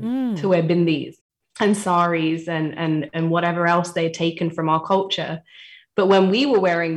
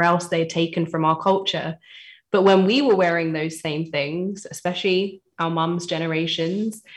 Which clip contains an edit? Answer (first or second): first